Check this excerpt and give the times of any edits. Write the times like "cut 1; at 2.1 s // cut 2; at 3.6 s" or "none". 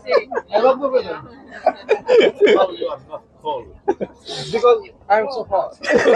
none